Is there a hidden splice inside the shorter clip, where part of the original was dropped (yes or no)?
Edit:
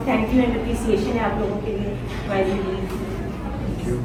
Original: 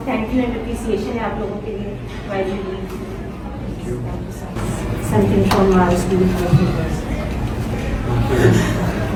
no